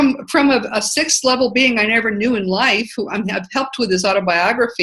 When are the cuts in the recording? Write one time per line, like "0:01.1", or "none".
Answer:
0:03.5